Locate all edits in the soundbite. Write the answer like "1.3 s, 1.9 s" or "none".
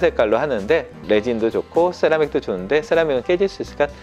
1.0 s